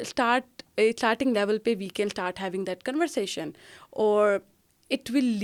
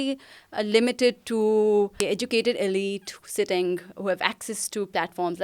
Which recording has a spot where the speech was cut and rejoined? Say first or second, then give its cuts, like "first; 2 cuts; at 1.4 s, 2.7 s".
second; 1 cut; at 2.0 s